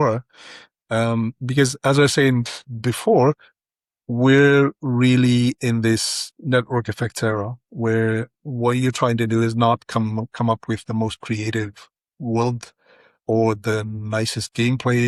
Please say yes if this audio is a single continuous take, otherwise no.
yes